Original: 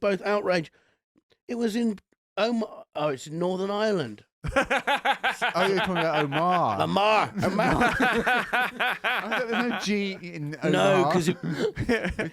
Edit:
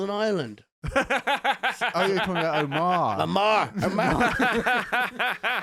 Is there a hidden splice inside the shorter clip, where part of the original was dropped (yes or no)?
no